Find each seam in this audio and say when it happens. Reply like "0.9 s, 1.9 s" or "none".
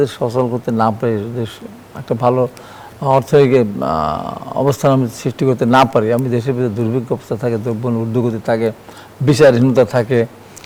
none